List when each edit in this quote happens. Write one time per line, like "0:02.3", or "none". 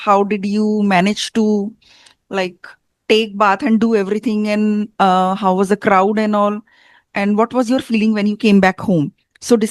none